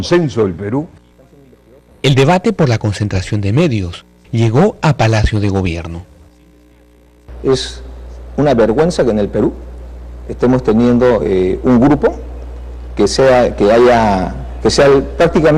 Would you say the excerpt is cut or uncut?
cut